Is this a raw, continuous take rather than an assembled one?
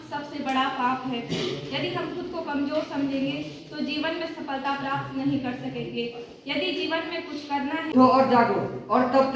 no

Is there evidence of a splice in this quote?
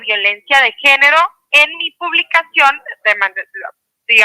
no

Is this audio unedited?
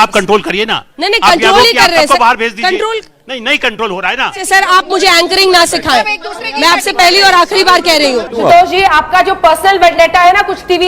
no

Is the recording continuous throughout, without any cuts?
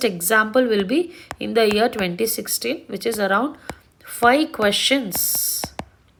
yes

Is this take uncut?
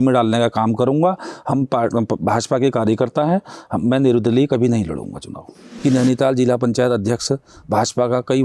no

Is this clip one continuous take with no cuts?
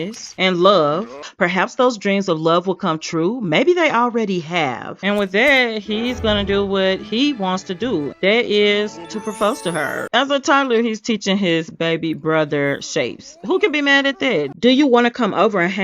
no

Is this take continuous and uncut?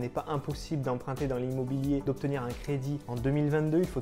yes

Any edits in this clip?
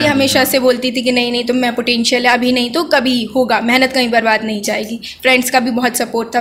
no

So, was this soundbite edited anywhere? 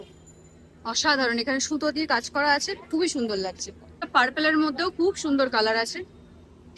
yes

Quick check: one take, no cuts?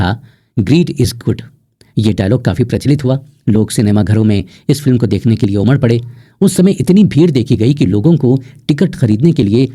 yes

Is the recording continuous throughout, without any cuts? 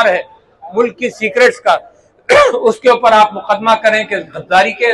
yes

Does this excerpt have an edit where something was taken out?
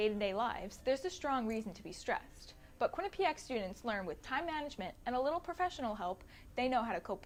no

